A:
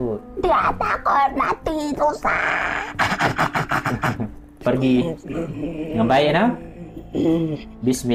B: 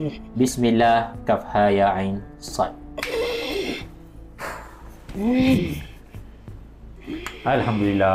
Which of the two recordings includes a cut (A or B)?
A